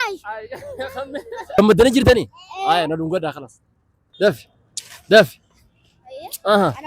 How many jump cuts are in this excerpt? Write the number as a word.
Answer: one